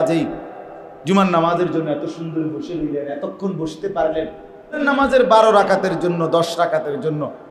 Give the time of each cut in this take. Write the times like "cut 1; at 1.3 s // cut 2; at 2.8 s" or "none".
cut 1; at 4.8 s